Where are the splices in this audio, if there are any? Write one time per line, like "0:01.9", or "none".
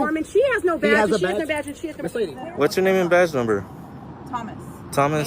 0:02.3